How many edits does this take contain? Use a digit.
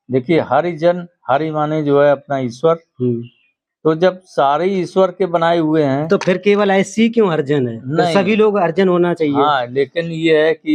0